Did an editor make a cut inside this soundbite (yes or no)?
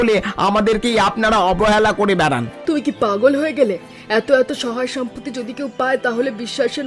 yes